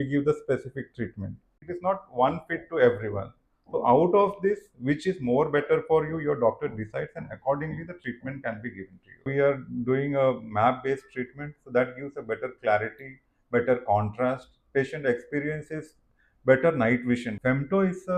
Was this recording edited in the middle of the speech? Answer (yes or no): yes